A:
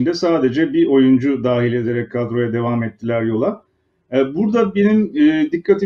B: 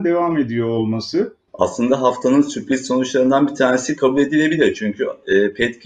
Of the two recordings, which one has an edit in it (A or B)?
B